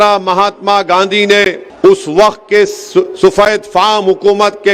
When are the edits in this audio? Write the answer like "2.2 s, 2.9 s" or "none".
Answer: 1.6 s

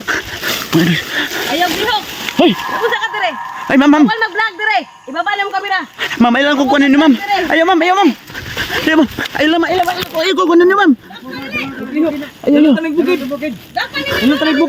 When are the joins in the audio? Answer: none

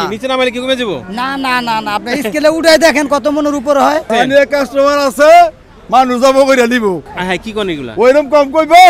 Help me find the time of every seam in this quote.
4.0 s

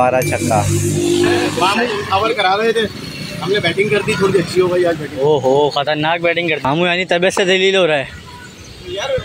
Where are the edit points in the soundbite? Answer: 1.5 s, 6.7 s

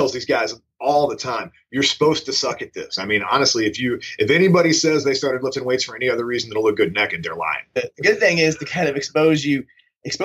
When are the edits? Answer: 2.9 s, 7.7 s

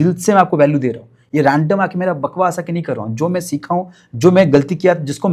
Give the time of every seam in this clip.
none

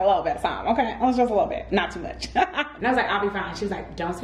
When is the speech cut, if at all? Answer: 2.7 s

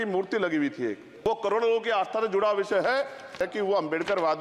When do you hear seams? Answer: 1.1 s, 3.4 s

